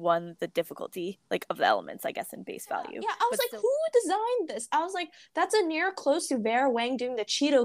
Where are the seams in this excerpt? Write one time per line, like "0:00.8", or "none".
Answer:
0:03.0